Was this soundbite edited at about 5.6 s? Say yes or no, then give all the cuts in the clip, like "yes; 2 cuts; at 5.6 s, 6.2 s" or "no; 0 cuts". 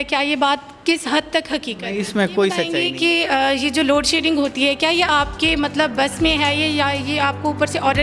no; 1 cut; at 2.7 s